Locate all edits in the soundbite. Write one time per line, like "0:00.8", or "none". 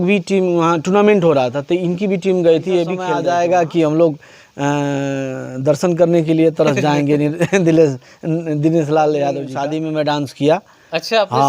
0:03.1
0:09.5